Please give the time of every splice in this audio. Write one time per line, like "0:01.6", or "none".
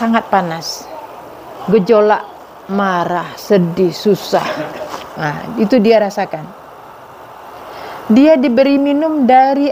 none

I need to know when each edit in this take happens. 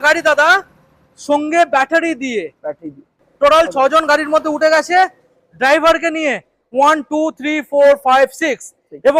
0:03.2

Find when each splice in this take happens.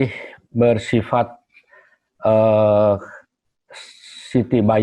none

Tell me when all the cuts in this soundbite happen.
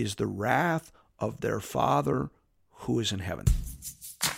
0:03.4

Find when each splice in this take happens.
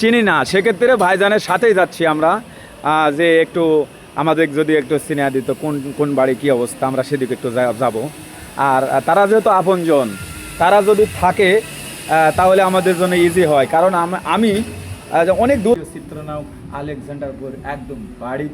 0:15.8

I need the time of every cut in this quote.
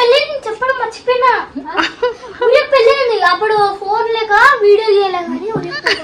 none

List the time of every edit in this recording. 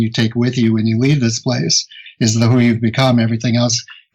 none

